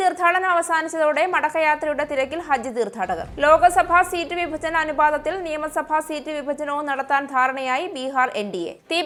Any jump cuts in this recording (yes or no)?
no